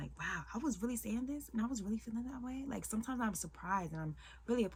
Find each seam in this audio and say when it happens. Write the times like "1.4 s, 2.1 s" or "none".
none